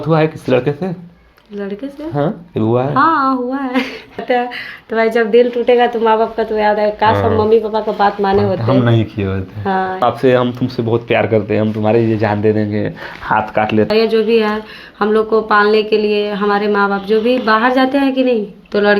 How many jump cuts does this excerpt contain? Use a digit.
3